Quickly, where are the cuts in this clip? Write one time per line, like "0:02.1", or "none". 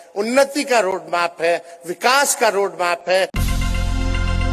0:03.4